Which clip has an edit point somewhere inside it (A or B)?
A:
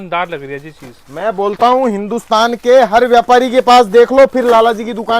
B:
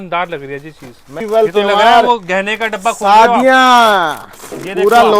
B